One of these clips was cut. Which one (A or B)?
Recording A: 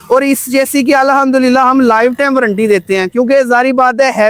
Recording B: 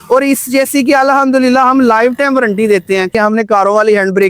B